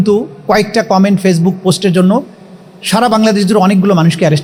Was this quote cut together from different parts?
no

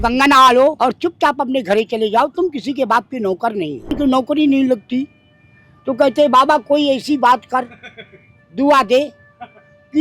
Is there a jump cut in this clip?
yes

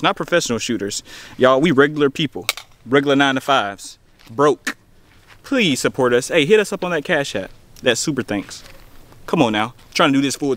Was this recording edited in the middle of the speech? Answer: no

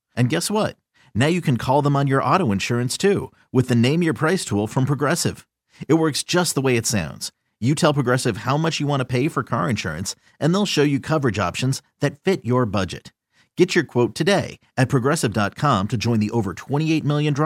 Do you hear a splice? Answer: no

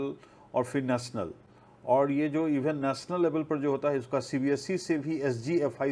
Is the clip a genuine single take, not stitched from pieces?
yes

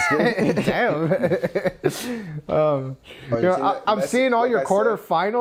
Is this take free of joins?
yes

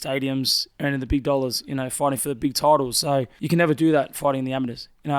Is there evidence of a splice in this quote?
yes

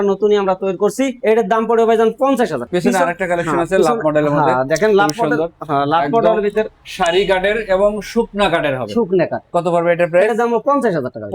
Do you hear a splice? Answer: no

